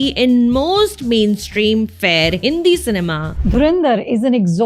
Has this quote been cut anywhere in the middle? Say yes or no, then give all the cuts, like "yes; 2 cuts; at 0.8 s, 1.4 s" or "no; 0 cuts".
yes; 1 cut; at 3.3 s